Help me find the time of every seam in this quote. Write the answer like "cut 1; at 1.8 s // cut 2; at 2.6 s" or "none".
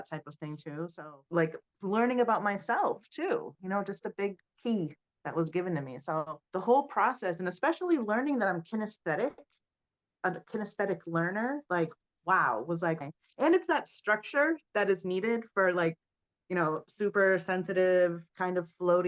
cut 1; at 0.9 s // cut 2; at 13.0 s